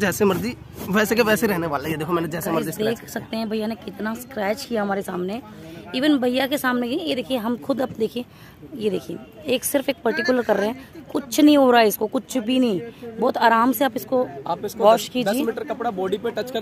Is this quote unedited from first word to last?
yes; 0 cuts

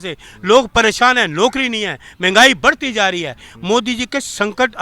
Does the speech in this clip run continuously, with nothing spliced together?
yes; 0 cuts

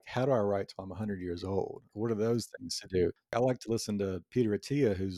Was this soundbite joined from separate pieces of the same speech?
yes; 2 cuts; at 1.9 s, 3.3 s

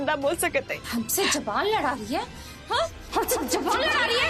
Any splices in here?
no; 0 cuts

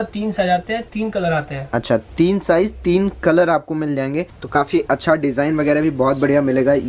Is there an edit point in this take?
yes; 1 cut; at 4.4 s

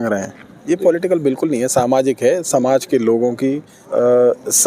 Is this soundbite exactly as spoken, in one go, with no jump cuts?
no; 1 cut; at 3.7 s

